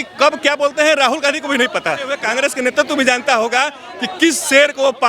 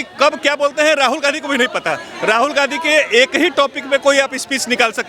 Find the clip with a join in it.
first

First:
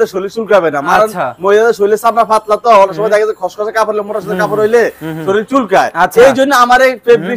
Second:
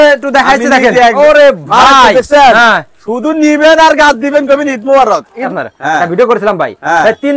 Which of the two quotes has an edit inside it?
second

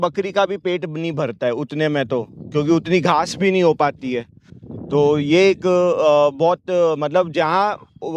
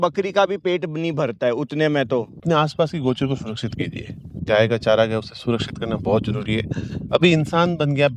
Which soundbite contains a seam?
second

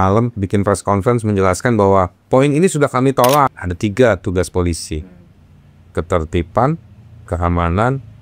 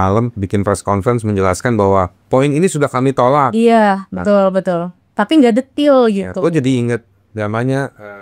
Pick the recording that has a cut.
first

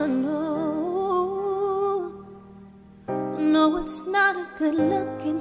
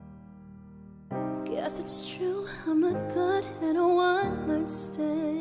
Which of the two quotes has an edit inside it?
second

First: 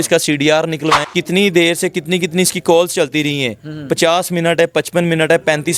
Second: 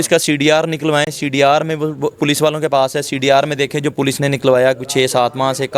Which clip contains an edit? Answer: first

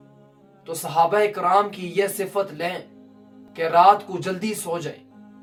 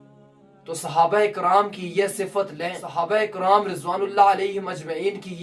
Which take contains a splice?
second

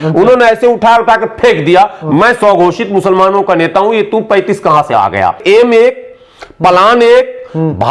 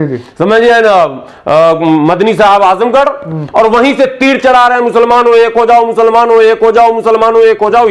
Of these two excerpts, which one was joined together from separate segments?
first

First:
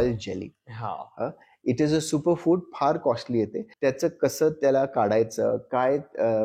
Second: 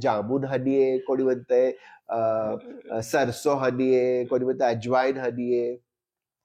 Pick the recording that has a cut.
first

